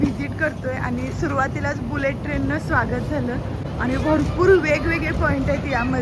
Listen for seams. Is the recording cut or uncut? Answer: uncut